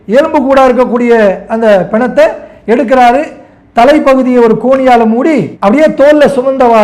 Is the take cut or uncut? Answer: uncut